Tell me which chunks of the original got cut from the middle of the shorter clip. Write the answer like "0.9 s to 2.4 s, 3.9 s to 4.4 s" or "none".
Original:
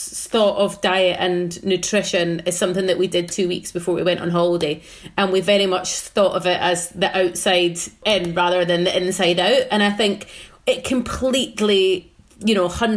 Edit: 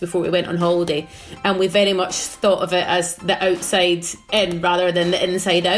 none